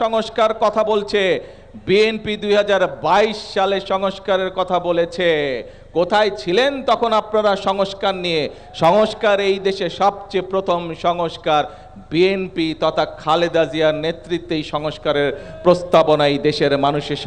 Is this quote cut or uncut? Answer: uncut